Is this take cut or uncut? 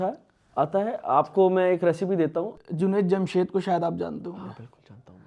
cut